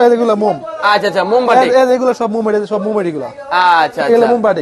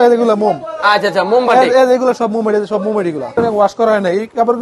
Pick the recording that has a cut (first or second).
second